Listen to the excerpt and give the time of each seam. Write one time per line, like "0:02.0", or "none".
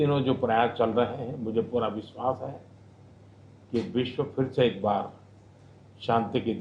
0:01.2

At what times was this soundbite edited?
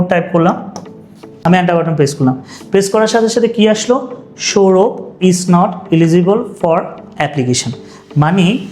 0:01.3

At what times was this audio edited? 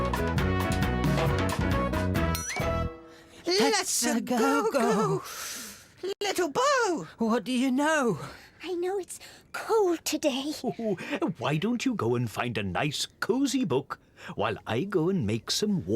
0:02.3

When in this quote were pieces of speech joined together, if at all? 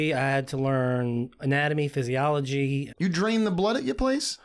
0:02.9

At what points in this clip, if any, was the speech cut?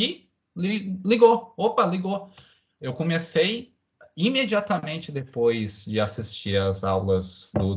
none

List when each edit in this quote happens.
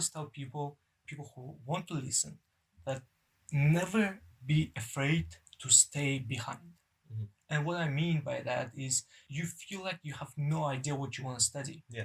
0:01.1
0:03.0
0:09.1

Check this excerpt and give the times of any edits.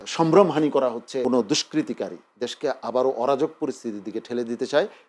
0:01.2

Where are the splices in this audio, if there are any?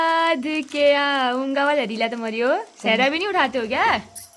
none

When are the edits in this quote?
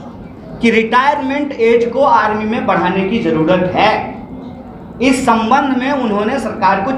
none

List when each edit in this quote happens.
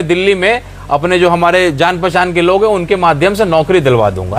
none

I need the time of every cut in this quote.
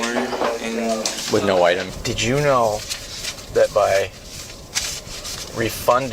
0:01.9

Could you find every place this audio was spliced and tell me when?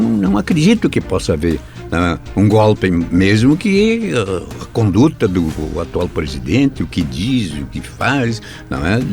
none

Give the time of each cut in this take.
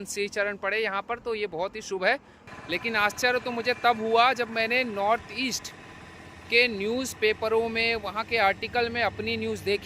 0:02.4

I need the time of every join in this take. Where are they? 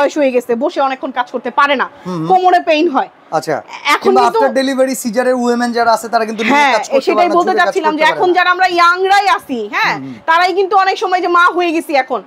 none

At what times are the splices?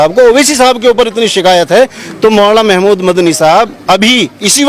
none

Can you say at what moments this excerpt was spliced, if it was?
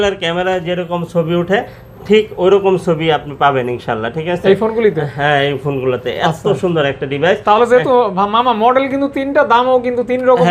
none

